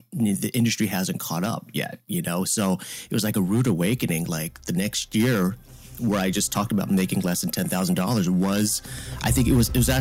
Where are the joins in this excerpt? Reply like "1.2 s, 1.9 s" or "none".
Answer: none